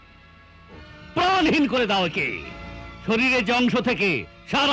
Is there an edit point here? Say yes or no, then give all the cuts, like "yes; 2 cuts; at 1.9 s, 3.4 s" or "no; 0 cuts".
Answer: yes; 1 cut; at 1.0 s